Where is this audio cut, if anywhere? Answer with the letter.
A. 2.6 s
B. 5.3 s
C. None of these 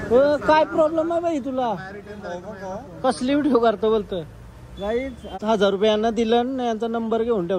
B